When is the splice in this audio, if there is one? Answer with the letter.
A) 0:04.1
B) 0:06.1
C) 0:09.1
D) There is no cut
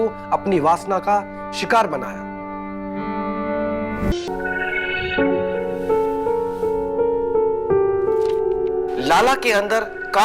A